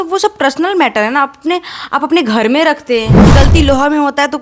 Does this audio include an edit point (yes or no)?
yes